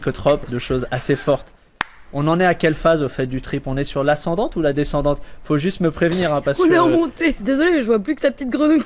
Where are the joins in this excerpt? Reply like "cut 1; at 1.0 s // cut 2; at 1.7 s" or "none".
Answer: cut 1; at 7.4 s